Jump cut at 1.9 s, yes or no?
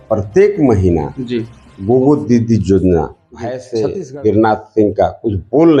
no